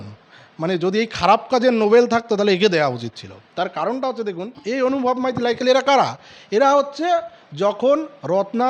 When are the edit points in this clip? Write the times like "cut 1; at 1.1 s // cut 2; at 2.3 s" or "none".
cut 1; at 4.5 s